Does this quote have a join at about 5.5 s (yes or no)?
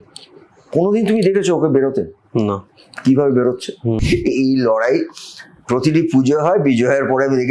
no